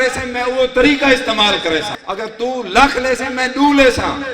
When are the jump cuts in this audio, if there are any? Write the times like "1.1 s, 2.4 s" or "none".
2.0 s